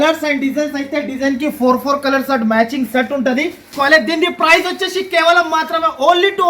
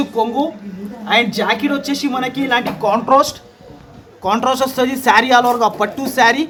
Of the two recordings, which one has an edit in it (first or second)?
first